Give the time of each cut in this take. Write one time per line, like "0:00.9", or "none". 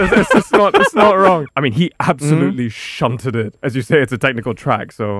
0:01.4
0:03.5